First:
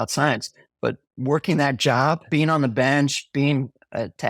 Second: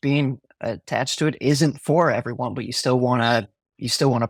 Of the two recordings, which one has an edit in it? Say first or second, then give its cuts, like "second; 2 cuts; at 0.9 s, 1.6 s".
first; 2 cuts; at 1.1 s, 2.2 s